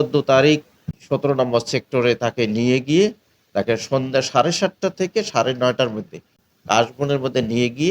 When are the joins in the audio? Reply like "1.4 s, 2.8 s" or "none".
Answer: 0.9 s, 6.4 s